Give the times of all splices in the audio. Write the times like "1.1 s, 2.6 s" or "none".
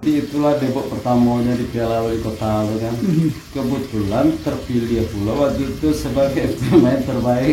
none